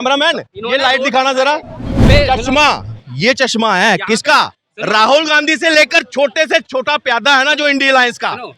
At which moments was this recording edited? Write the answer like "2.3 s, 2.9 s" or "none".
2.0 s

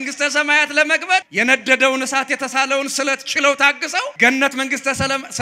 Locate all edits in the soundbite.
1.3 s, 4.1 s

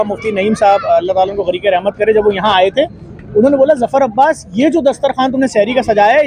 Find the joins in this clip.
none

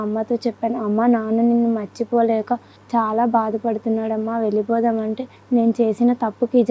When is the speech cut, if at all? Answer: 2.7 s, 5.3 s

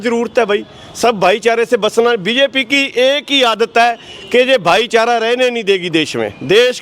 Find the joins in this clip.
none

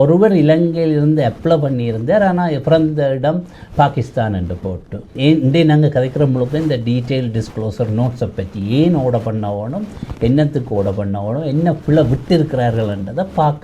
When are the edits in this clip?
5.1 s

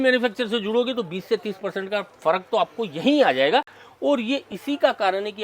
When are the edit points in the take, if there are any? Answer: none

